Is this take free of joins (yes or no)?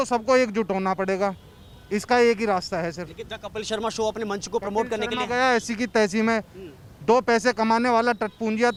yes